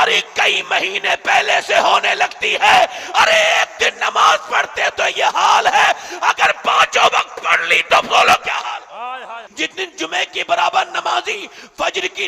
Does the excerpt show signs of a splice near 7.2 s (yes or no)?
no